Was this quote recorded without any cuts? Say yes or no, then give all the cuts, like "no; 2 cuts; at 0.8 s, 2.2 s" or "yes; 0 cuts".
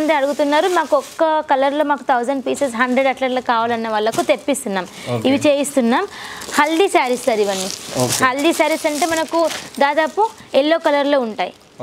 yes; 0 cuts